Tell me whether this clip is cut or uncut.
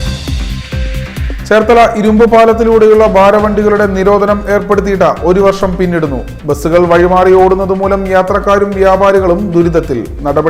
uncut